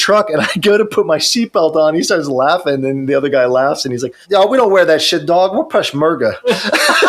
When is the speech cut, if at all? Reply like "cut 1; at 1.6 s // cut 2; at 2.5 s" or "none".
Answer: cut 1; at 4.2 s